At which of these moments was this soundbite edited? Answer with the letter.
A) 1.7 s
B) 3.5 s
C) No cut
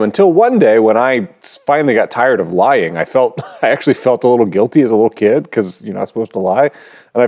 C